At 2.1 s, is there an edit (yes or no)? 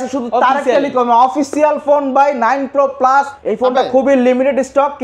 no